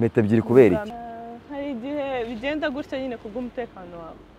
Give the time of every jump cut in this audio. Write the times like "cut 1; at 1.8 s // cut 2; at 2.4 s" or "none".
cut 1; at 0.9 s